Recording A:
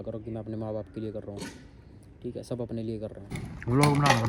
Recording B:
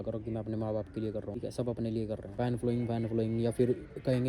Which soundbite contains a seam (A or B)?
B